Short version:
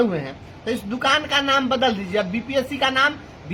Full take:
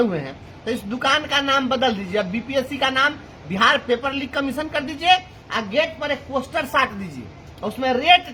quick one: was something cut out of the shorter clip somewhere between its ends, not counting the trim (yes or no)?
no